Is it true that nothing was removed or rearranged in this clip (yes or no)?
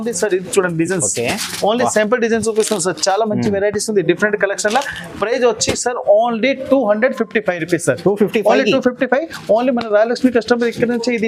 yes